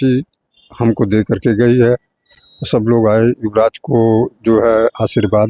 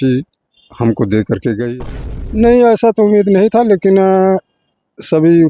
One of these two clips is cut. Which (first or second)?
second